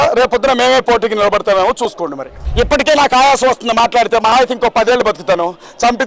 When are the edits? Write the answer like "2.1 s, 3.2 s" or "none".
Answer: 2.4 s